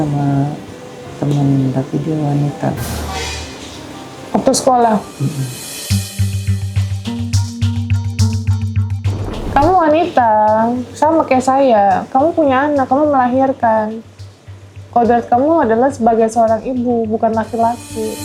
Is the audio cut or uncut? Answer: cut